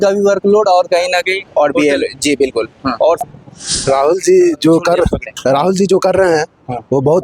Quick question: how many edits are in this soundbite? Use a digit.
1